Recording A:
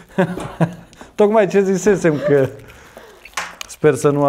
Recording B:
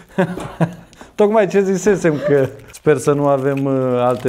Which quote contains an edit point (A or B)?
B